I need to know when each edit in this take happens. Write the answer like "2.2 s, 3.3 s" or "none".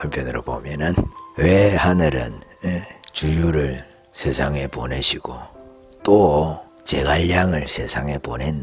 none